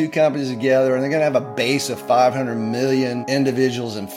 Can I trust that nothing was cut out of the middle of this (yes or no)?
no